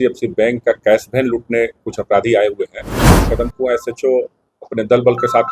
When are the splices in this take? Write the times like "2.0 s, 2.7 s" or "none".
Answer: 3.3 s